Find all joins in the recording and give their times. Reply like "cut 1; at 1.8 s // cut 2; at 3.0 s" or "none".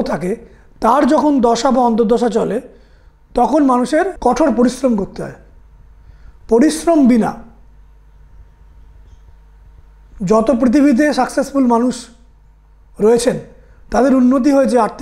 cut 1; at 4.1 s